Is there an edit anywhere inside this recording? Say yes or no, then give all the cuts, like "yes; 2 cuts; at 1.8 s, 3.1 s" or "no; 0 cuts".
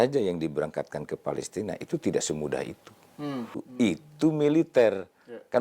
yes; 1 cut; at 3.6 s